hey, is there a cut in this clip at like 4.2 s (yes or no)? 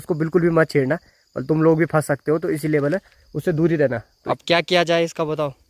yes